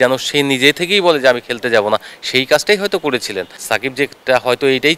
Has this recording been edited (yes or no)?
yes